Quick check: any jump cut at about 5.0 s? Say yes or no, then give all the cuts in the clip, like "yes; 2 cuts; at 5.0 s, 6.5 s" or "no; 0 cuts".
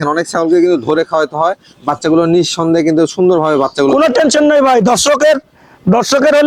no; 0 cuts